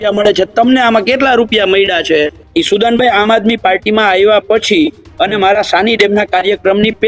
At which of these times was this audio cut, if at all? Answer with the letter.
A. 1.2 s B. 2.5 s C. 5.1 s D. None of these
B